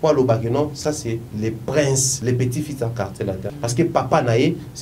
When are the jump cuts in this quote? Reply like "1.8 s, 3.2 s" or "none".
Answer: 2.1 s, 3.5 s